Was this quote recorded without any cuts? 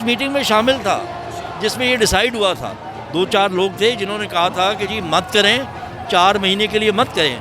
yes; 0 cuts

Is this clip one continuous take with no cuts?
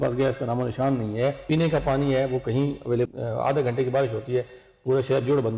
no; 2 cuts; at 1.4 s, 3.1 s

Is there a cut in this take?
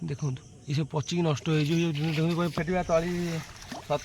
yes; 1 cut; at 2.5 s

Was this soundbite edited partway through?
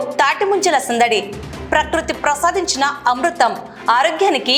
no; 0 cuts

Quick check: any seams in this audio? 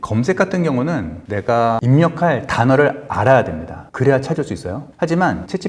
no; 0 cuts

